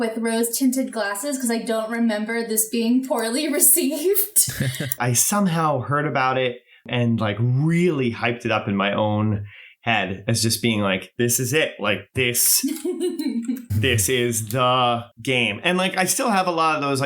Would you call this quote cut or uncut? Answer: cut